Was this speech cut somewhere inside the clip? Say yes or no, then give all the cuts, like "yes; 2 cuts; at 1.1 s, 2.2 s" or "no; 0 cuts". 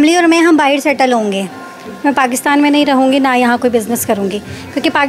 no; 0 cuts